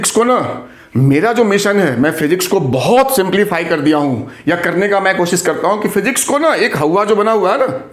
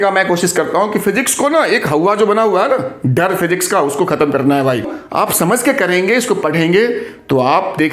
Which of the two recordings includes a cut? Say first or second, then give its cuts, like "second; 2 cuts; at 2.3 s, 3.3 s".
second; 1 cut; at 5.0 s